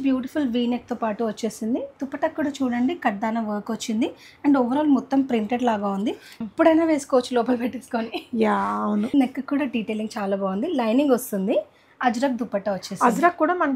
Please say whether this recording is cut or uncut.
cut